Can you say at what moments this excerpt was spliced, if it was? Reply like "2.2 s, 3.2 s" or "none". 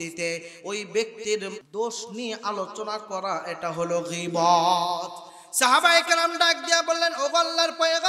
1.6 s

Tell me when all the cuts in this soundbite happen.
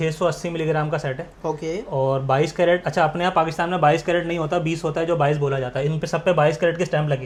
none

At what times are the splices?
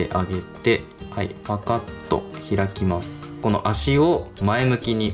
3.3 s

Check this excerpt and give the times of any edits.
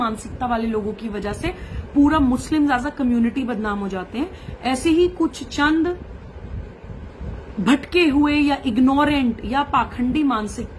none

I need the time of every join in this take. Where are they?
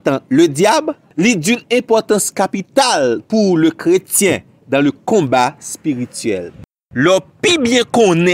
6.8 s

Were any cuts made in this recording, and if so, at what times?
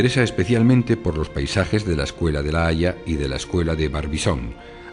3.8 s

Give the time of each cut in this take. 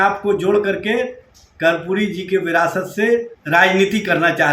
3.4 s

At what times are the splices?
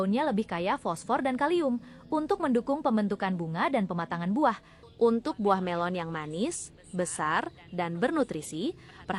none

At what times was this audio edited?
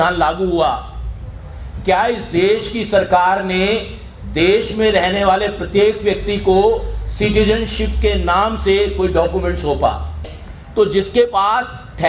10.2 s

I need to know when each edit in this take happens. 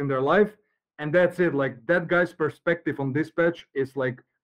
none

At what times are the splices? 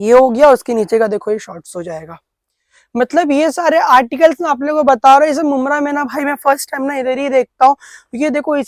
none

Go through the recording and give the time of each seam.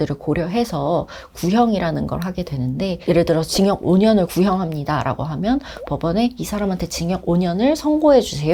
none

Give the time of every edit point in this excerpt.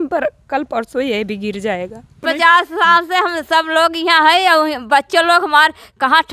2.2 s

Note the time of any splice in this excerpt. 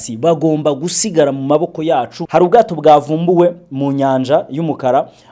2.2 s

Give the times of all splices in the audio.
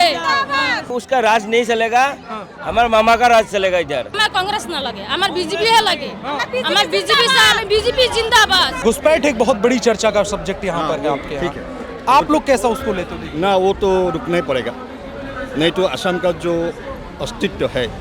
1.0 s, 4.1 s, 8.7 s

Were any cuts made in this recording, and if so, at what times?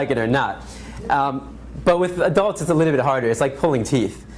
1.3 s

